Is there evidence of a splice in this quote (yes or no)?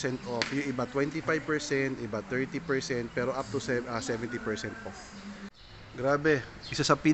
yes